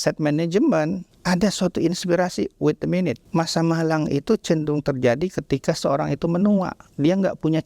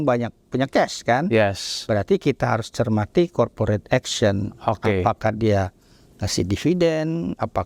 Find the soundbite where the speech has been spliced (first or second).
first